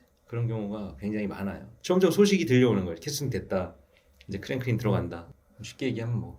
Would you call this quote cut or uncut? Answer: cut